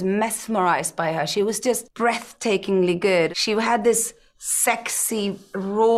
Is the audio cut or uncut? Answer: cut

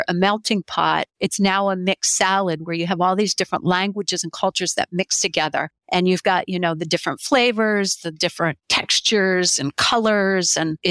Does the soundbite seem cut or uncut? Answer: uncut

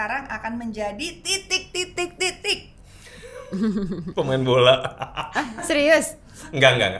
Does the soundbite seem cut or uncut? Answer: uncut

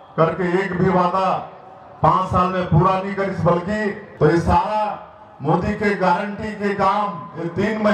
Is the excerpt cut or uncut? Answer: cut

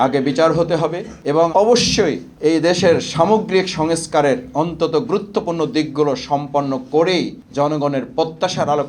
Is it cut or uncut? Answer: cut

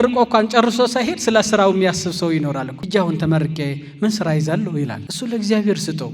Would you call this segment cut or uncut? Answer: cut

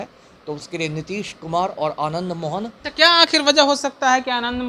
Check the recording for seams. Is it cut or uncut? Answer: cut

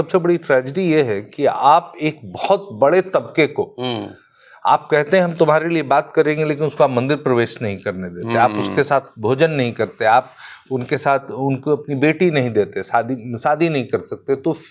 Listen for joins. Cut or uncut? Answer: uncut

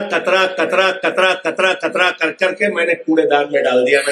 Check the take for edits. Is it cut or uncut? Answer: uncut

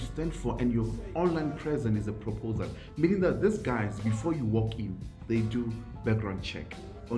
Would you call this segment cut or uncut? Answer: uncut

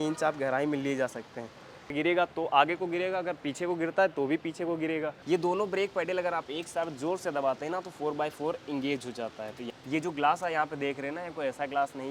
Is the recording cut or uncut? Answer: cut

